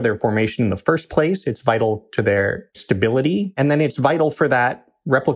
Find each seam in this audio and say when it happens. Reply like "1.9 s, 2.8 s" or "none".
2.7 s, 3.5 s